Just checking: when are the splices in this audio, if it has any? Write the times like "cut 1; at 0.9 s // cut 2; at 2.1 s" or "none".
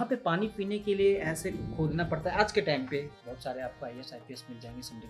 cut 1; at 3.1 s